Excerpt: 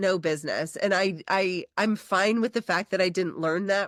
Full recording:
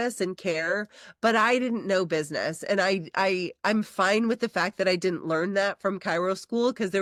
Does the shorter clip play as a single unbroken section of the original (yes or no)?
yes